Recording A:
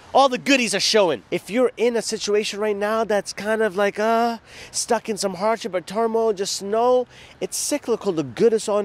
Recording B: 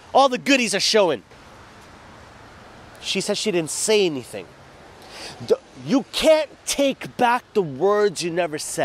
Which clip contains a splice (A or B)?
A